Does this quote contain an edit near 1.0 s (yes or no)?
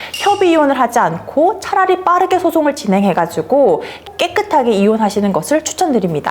no